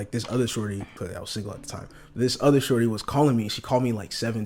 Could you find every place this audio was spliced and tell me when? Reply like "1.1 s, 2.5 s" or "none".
0.9 s

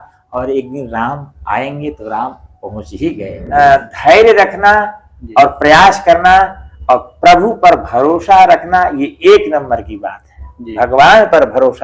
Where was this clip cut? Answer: 3.3 s

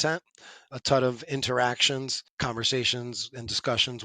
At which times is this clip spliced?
2.2 s

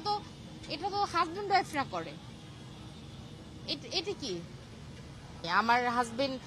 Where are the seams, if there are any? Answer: 5.5 s

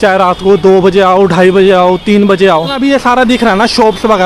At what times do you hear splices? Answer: 2.8 s

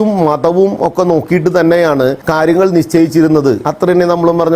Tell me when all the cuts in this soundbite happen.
2.2 s, 3.6 s

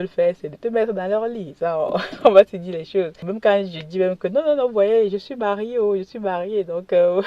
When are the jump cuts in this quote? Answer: 3.3 s

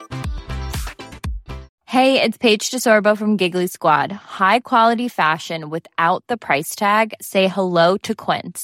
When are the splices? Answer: 1.7 s

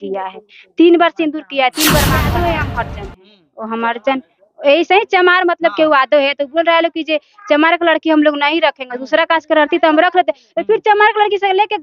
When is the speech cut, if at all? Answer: 2.2 s

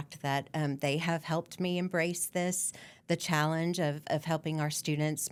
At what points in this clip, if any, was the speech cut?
none

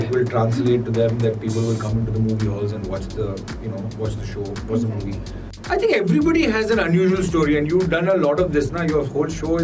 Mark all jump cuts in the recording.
5.5 s

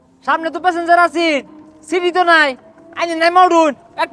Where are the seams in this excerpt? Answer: none

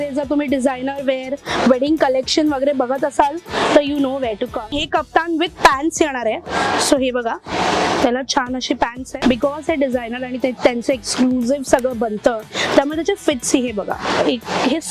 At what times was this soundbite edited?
4.6 s, 9.2 s

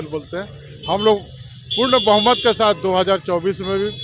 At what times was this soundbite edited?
none

